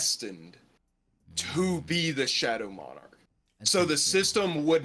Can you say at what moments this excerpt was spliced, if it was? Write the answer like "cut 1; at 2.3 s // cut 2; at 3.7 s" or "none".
none